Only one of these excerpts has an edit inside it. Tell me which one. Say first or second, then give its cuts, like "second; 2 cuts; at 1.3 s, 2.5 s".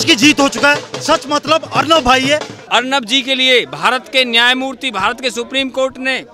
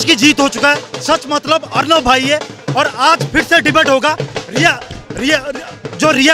first; 1 cut; at 2.5 s